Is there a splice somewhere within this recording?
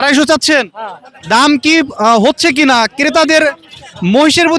no; 0 cuts

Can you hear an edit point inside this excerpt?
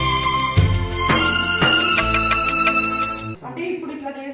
yes; 1 cut; at 3.4 s

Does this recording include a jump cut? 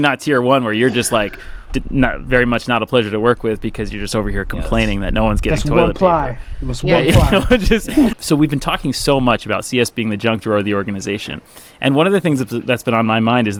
no; 0 cuts

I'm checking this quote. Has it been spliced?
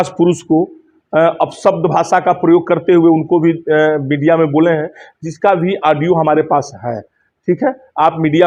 no; 0 cuts

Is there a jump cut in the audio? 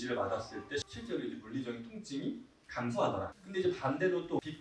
no; 0 cuts

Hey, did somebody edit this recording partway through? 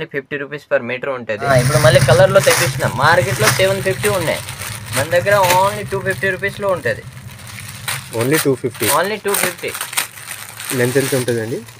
yes; 1 cut; at 1.5 s

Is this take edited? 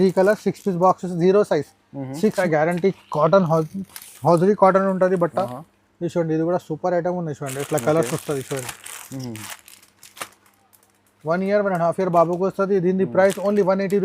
yes; 1 cut; at 2.4 s

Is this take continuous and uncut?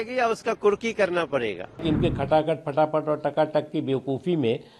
no; 1 cut; at 1.8 s

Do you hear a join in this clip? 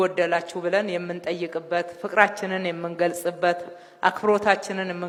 no; 0 cuts

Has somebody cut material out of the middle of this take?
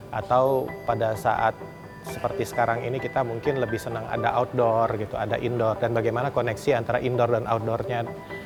no; 0 cuts

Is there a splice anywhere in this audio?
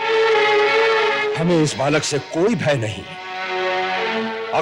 yes; 1 cut; at 1.3 s

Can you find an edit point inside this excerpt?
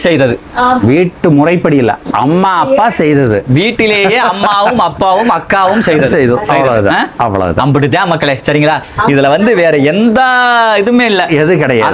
no; 0 cuts

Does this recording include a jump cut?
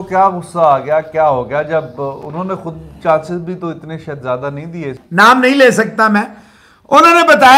yes; 1 cut; at 5.0 s

